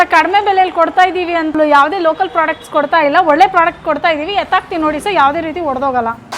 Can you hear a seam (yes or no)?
yes